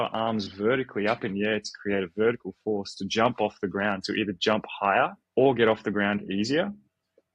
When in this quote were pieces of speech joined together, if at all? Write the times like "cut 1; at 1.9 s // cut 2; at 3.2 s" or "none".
cut 1; at 5.2 s